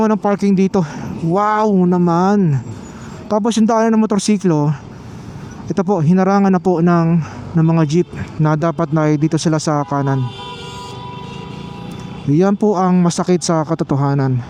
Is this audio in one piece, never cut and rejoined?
yes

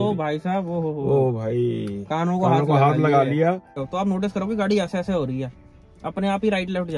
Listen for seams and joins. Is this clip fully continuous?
no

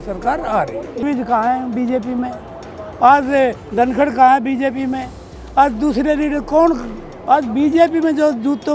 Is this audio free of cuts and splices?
no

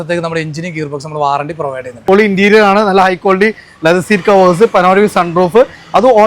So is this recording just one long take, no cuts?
no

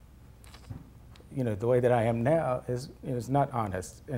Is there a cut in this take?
no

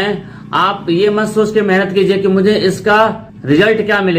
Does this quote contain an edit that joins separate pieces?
yes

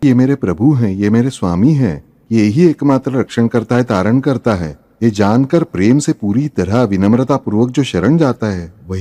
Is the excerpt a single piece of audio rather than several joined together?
yes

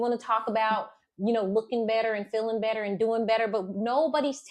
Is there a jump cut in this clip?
no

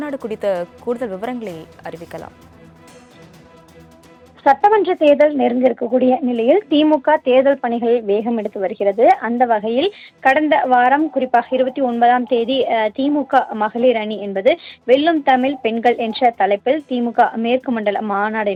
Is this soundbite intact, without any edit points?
yes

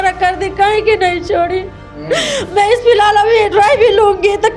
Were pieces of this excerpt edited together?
no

